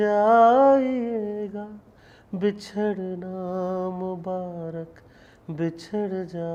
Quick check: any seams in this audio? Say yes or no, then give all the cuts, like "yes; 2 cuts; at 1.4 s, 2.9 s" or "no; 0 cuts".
no; 0 cuts